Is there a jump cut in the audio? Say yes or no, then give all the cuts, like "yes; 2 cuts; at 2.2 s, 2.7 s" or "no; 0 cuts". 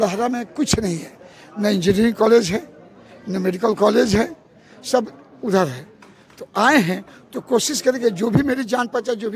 no; 0 cuts